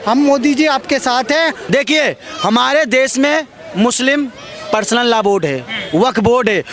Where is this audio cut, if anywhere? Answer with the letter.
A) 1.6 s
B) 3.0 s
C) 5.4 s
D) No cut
A